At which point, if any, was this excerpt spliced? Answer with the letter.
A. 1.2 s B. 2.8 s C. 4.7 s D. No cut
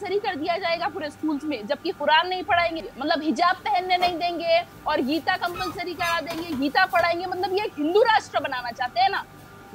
B